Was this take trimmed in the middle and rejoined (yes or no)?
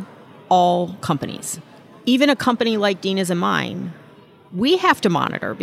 yes